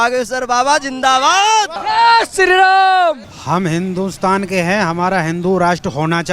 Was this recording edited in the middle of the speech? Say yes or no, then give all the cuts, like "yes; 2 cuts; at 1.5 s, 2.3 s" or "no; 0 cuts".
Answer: yes; 2 cuts; at 1.8 s, 3.3 s